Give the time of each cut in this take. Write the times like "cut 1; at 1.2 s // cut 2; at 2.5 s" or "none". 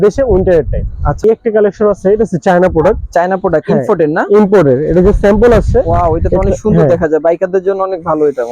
cut 1; at 1.2 s